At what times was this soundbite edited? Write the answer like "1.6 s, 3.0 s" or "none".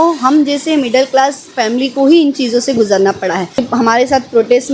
3.6 s